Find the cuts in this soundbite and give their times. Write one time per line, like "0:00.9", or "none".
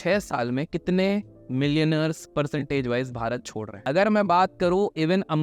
0:03.7